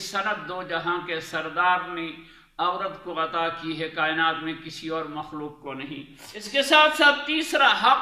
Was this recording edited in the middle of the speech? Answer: yes; 1 cut; at 6.5 s

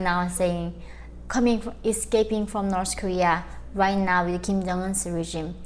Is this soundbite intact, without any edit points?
yes; 0 cuts

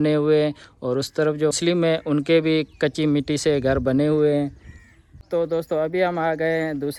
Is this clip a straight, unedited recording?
yes; 0 cuts

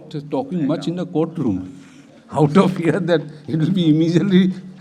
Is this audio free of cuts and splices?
yes; 0 cuts

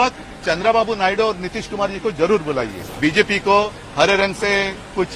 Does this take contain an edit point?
yes; 1 cut; at 2.8 s

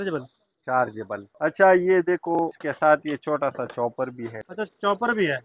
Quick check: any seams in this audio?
yes; 3 cuts; at 1.3 s, 2.6 s, 4.4 s

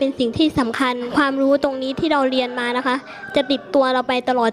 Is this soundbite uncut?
no; 1 cut; at 1.1 s

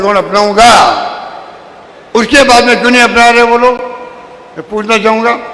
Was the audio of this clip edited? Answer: no; 0 cuts

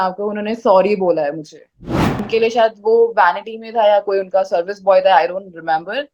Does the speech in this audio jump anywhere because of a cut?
yes; 1 cut; at 2.2 s

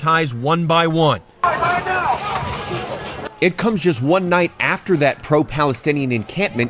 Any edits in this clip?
yes; 1 cut; at 1.4 s

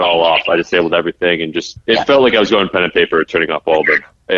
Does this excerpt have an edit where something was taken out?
yes; 1 cut; at 1.7 s

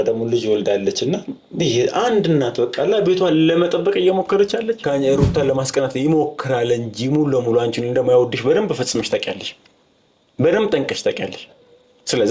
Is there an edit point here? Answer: yes; 1 cut; at 4.8 s

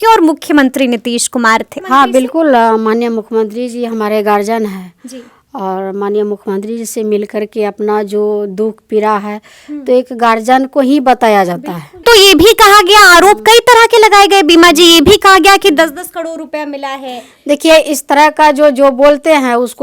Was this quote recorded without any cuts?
no; 2 cuts; at 1.7 s, 12.0 s

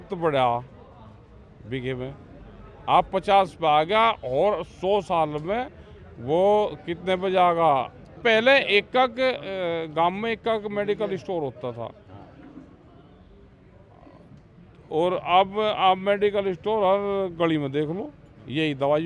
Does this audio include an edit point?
yes; 1 cut; at 8.2 s

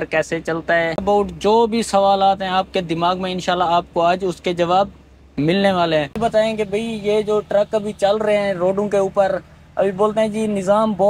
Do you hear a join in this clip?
yes; 2 cuts; at 1.0 s, 6.2 s

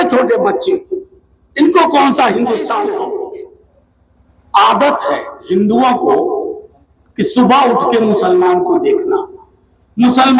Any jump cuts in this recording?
yes; 1 cut; at 2.9 s

